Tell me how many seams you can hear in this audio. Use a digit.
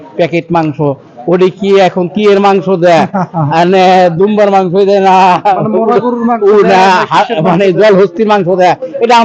0